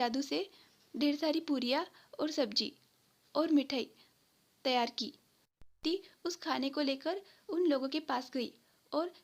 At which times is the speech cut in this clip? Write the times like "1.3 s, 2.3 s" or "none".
none

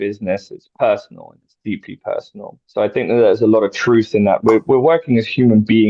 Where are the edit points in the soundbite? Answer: 2.5 s

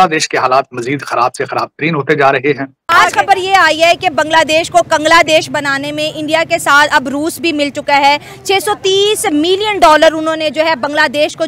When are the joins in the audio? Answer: 2.7 s

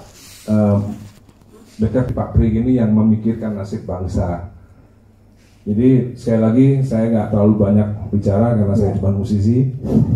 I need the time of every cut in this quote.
2.1 s

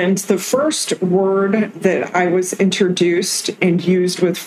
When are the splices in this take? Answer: none

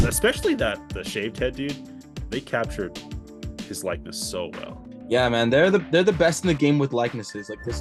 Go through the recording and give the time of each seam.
none

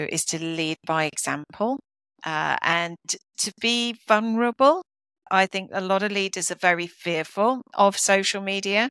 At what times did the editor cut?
5.2 s

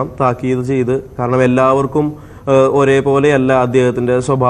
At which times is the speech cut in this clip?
1.1 s

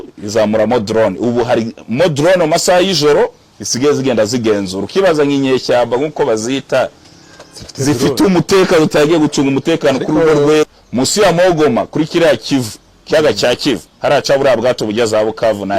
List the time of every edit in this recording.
10.7 s

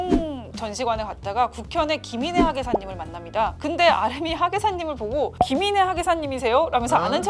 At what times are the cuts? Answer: none

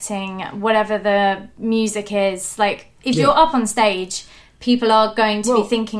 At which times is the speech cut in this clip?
2.9 s

